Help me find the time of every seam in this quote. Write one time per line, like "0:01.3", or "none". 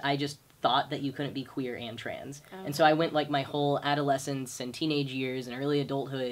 none